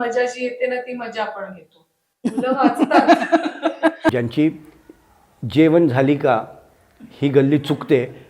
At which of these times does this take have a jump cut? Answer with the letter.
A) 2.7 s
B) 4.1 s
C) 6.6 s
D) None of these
B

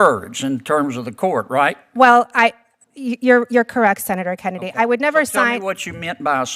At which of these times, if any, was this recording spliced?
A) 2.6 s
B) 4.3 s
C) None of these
C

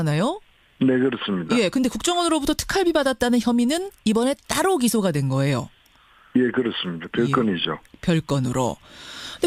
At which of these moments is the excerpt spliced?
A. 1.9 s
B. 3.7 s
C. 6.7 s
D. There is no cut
D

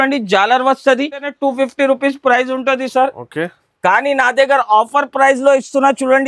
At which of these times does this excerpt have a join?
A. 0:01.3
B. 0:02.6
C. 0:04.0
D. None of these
A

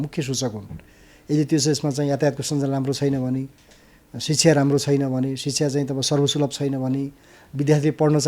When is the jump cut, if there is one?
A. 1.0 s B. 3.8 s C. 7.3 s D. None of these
D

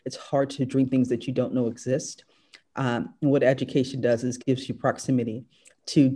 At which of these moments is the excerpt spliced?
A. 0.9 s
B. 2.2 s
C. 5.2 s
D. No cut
D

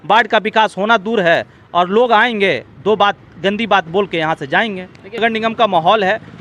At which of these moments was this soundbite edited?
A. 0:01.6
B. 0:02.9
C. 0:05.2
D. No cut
C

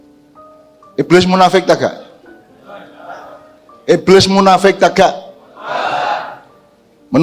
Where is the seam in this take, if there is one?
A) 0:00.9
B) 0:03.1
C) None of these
A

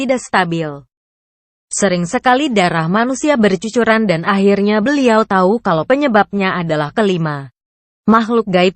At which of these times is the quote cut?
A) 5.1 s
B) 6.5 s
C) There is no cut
A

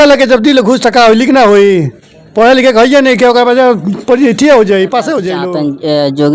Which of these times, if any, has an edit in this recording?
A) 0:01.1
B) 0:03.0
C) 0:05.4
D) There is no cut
C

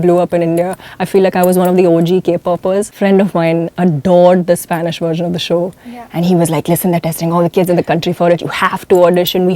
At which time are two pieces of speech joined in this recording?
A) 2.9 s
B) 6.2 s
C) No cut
A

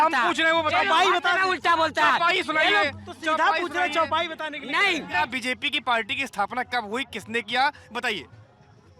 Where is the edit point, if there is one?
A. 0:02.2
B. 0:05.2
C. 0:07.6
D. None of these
B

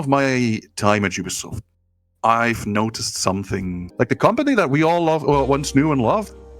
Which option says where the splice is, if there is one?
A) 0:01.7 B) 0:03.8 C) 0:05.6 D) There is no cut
B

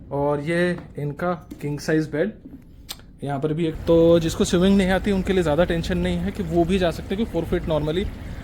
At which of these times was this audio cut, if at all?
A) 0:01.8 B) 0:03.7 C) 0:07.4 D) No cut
B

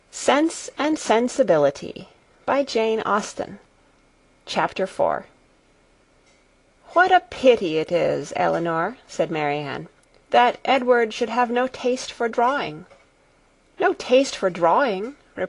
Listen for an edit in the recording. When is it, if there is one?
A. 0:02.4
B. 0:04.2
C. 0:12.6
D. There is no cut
C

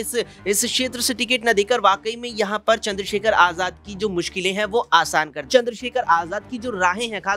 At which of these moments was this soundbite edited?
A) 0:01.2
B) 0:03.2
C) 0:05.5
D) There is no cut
C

